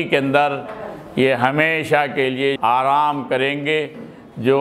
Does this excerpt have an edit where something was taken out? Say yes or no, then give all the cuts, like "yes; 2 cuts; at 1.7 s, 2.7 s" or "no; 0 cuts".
yes; 1 cut; at 2.6 s